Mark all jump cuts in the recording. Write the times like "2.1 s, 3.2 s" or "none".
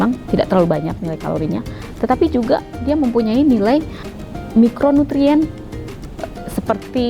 4.1 s, 6.3 s